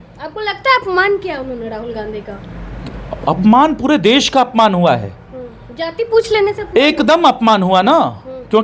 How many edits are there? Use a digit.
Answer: 0